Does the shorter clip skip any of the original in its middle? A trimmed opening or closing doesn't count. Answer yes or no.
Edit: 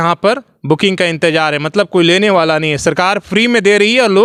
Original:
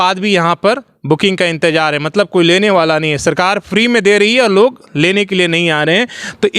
no